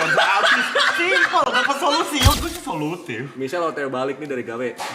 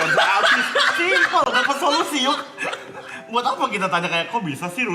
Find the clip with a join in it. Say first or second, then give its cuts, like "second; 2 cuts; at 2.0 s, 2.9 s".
first; 1 cut; at 2.4 s